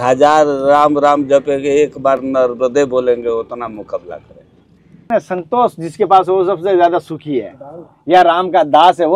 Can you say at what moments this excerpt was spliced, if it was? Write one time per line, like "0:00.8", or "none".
0:05.1